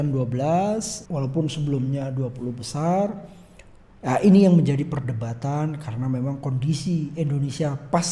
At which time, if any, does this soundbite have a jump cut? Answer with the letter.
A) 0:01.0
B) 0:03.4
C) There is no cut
A